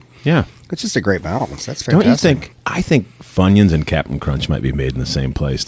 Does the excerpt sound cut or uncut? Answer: uncut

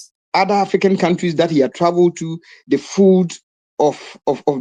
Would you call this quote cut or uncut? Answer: uncut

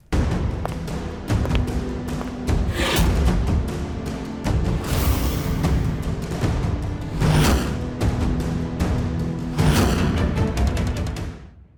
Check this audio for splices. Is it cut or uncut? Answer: uncut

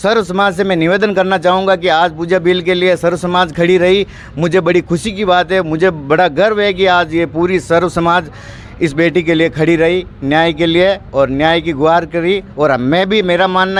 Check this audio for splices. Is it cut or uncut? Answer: uncut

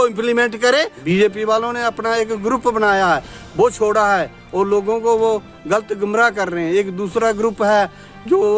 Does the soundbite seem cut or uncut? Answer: cut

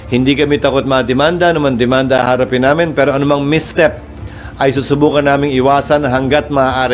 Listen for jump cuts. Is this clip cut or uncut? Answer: uncut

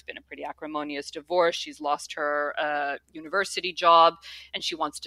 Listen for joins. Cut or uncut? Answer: uncut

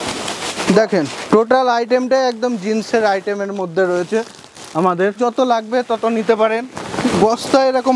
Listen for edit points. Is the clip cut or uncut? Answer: cut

